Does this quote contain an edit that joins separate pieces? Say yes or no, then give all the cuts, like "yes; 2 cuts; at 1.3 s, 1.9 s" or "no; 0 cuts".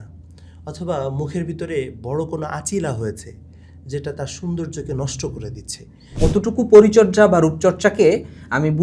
yes; 1 cut; at 6.1 s